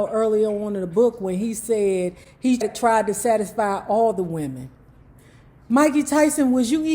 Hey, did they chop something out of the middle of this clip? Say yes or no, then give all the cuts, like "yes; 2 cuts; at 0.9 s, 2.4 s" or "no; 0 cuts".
yes; 1 cut; at 2.7 s